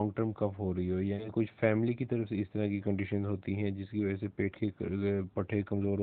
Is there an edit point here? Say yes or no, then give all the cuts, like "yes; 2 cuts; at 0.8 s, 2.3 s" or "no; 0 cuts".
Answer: yes; 1 cut; at 1.3 s